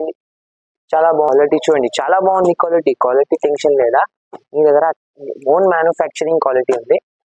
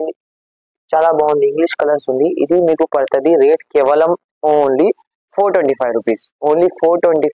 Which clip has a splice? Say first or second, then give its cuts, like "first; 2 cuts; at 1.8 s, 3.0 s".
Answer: first; 1 cut; at 1.3 s